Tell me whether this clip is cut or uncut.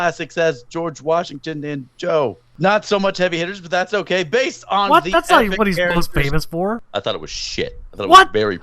cut